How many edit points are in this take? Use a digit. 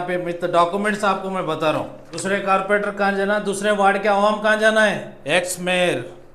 2